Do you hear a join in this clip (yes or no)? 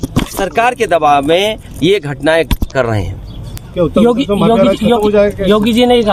no